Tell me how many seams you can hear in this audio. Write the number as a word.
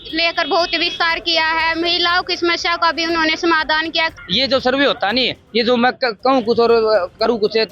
one